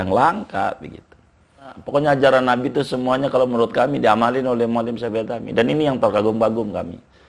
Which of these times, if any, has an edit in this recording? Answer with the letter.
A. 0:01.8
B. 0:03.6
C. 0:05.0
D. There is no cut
A